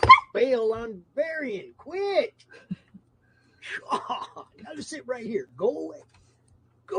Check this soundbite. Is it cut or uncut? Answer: cut